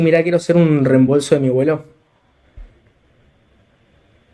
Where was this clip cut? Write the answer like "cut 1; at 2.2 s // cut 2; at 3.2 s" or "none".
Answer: none